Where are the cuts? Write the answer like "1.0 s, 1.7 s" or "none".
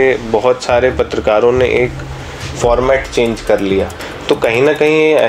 4.0 s